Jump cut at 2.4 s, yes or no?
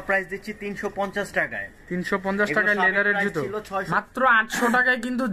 no